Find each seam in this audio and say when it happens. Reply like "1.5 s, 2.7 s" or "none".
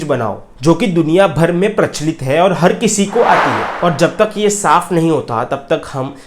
3.6 s